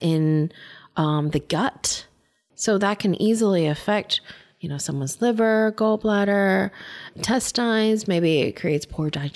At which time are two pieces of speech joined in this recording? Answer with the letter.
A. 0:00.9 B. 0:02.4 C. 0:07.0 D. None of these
C